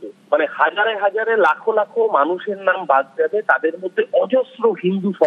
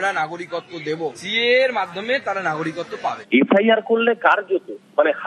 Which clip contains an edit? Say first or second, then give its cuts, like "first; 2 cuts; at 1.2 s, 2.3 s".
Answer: second; 2 cuts; at 1.2 s, 3.2 s